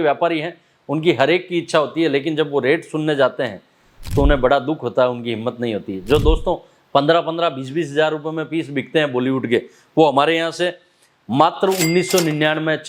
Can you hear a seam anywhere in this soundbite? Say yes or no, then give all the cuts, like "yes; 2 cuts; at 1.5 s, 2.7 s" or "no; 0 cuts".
no; 0 cuts